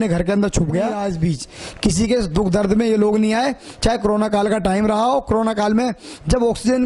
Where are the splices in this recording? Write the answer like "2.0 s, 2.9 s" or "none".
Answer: 1.0 s